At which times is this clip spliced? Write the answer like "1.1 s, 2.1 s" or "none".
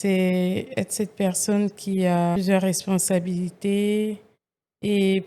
2.4 s